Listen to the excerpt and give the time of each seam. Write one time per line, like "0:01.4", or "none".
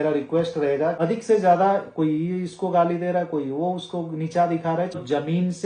0:01.0
0:04.9